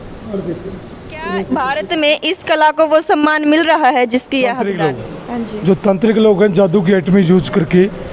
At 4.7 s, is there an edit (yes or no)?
yes